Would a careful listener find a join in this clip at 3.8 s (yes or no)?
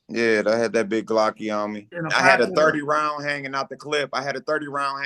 no